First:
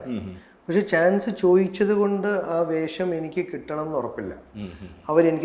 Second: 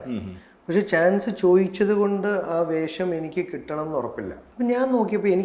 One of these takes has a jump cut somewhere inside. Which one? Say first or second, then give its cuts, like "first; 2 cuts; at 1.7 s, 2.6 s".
second; 1 cut; at 4.4 s